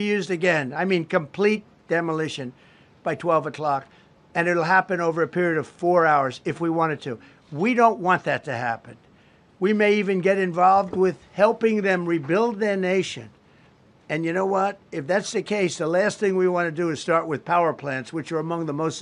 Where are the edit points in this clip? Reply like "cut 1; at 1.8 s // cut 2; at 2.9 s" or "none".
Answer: none

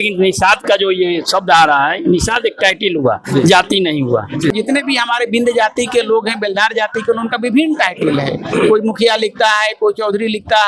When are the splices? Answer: cut 1; at 4.5 s

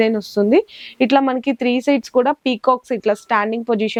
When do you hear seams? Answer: none

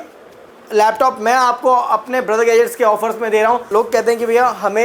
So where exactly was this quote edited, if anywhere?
cut 1; at 3.6 s

